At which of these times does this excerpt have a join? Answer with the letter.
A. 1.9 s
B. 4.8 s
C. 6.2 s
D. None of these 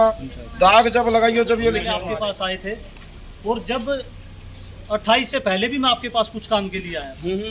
A